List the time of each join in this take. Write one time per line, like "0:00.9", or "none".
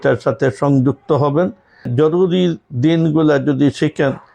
0:01.9